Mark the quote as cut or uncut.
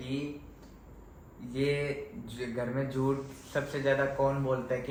uncut